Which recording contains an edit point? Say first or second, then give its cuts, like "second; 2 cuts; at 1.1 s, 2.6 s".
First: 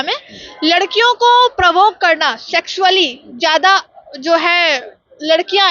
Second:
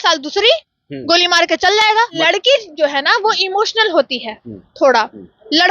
second; 1 cut; at 2.2 s